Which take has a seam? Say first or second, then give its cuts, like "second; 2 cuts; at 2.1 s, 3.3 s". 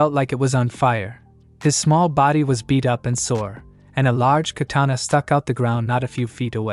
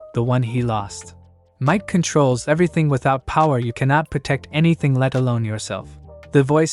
second; 1 cut; at 1.5 s